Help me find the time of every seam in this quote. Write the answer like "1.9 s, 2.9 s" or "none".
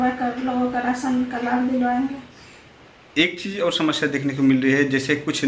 none

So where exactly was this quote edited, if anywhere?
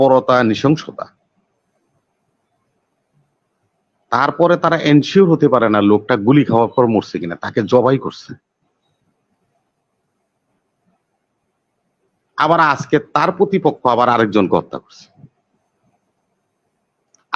none

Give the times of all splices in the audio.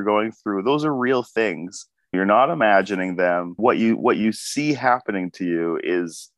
2.1 s, 3.5 s

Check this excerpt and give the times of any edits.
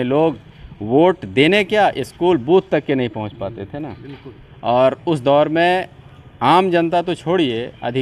none

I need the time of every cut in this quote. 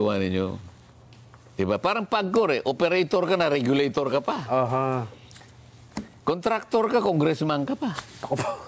none

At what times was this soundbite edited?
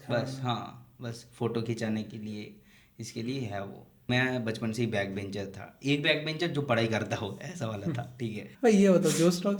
4.1 s, 8.4 s

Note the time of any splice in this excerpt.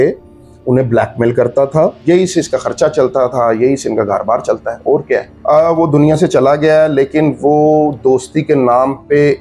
2.0 s, 5.3 s

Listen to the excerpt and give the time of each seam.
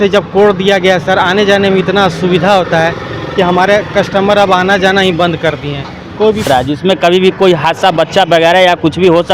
6.5 s

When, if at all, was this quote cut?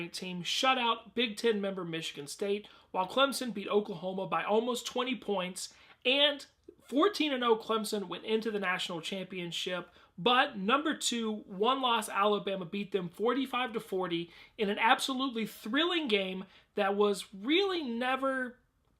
17.7 s

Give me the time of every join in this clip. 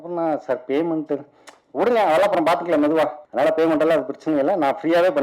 3.2 s

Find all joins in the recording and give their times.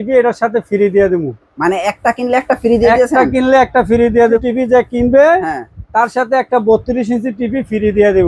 4.4 s

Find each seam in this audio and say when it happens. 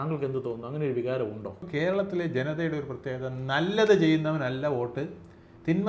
1.6 s

